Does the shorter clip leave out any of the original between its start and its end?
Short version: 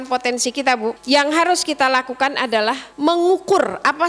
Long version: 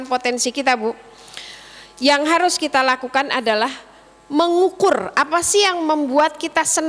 yes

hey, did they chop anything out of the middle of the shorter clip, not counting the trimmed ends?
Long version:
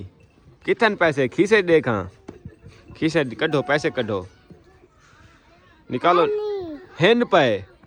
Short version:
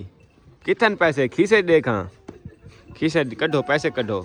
no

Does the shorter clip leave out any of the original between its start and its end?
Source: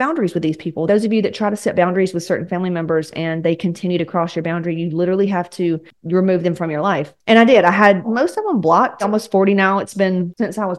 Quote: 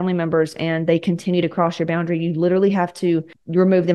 no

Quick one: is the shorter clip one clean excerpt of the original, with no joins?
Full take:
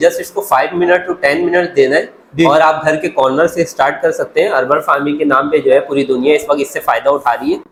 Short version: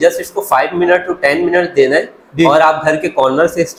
yes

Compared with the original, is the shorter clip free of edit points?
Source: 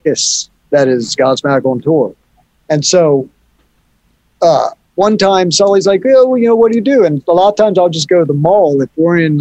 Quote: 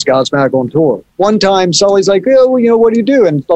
no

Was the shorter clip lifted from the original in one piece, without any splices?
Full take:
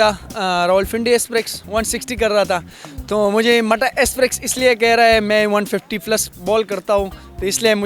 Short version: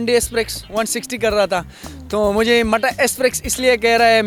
yes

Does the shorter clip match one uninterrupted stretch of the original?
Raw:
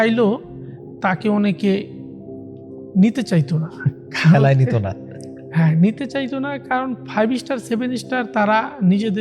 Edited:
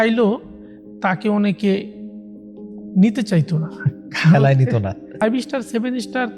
no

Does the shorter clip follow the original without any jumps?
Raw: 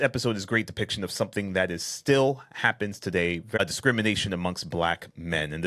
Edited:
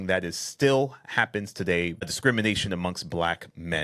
no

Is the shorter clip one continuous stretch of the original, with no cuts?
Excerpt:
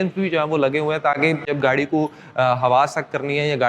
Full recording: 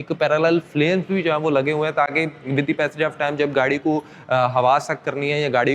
no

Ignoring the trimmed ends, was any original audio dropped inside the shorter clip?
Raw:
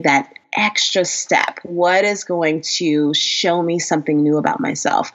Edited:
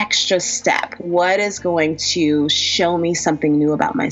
no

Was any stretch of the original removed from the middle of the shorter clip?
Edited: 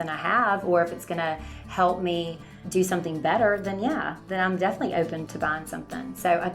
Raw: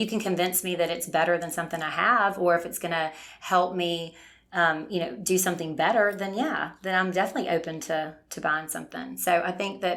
yes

